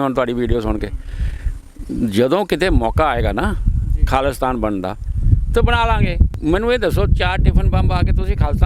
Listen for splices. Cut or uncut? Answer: cut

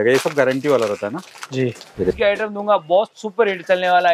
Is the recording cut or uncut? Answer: cut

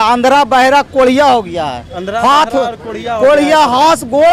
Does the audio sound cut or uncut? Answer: uncut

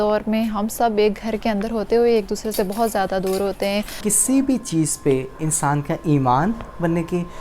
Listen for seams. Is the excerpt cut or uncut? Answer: cut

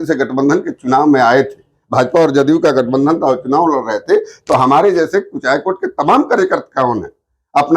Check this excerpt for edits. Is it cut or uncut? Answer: uncut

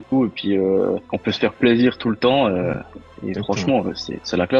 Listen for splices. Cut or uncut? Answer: uncut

